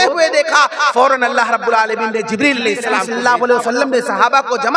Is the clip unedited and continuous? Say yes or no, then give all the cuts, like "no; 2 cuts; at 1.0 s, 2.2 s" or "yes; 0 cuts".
no; 1 cut; at 3.1 s